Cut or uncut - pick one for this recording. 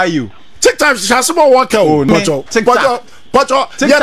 cut